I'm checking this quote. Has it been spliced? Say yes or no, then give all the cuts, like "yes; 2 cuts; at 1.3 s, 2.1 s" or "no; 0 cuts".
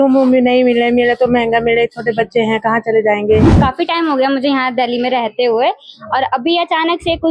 yes; 1 cut; at 3.5 s